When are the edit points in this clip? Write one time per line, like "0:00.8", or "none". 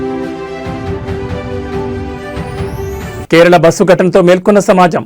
0:02.4